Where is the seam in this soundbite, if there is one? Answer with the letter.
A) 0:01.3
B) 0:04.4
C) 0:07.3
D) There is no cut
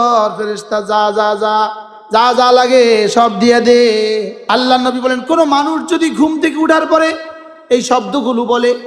B